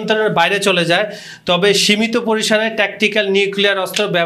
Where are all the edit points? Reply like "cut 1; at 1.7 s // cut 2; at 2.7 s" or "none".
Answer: none

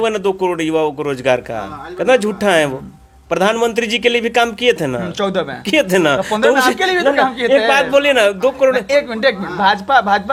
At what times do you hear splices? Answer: none

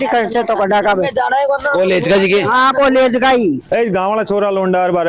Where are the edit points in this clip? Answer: cut 1; at 3.6 s

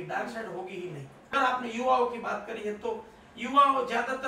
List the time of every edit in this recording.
cut 1; at 1.2 s

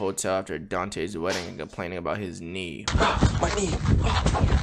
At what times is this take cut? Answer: cut 1; at 2.9 s

